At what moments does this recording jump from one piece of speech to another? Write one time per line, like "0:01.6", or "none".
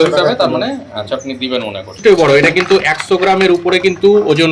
0:02.0